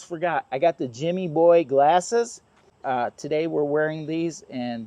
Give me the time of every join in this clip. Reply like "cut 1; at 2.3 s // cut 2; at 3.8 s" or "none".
cut 1; at 2.7 s